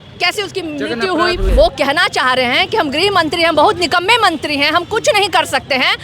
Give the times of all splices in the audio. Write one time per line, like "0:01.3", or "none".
0:01.5